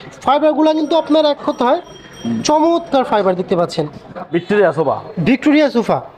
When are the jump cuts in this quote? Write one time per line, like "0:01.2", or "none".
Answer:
0:04.3